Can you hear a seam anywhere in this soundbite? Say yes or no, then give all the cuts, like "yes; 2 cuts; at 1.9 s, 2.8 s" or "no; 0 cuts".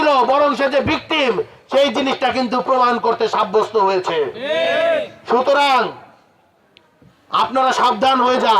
no; 0 cuts